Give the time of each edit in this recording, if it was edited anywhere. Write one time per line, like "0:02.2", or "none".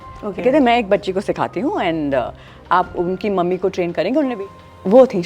0:04.3